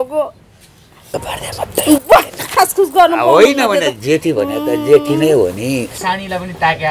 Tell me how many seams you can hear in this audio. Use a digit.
2